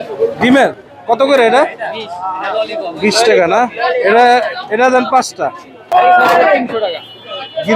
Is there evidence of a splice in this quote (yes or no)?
yes